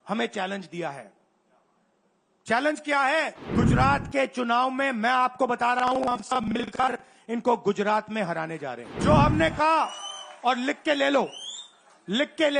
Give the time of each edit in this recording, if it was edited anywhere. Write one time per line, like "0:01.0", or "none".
0:03.4
0:08.9